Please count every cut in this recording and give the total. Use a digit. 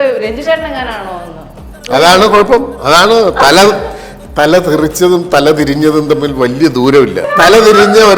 1